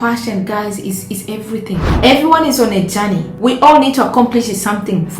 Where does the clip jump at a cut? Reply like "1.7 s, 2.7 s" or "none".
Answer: 1.8 s